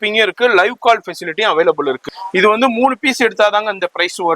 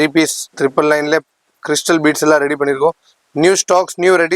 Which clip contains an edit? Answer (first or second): first